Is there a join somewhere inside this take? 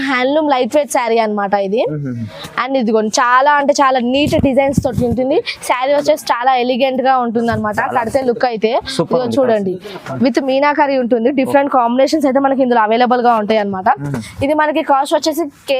no; 0 cuts

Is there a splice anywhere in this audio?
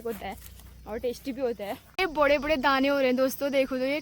yes; 1 cut; at 1.9 s

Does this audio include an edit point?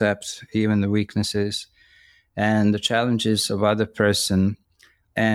no; 0 cuts

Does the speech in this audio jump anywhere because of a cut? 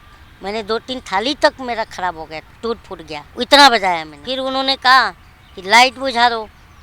yes; 3 cuts; at 2.5 s, 3.3 s, 4.2 s

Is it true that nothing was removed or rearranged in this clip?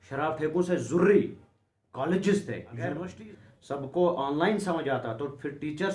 no; 1 cut; at 2.9 s

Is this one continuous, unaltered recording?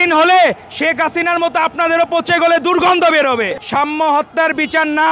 no; 1 cut; at 3.5 s

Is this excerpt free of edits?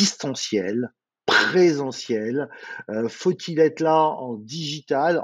yes; 0 cuts

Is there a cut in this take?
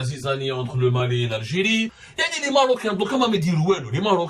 yes; 1 cut; at 2.1 s

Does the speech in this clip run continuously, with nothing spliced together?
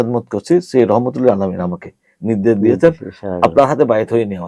yes; 0 cuts

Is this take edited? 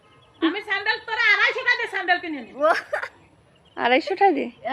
no; 0 cuts

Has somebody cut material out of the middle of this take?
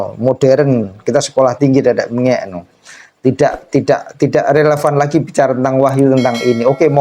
no; 0 cuts

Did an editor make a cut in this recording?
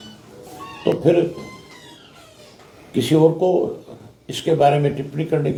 no; 0 cuts

